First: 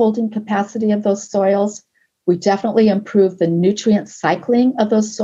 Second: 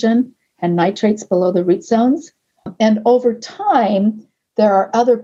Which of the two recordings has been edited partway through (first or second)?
second